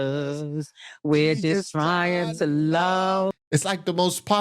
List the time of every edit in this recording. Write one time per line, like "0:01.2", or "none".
0:03.3